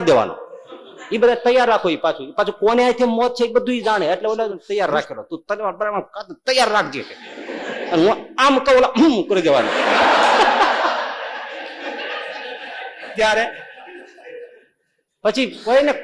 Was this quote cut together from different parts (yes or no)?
yes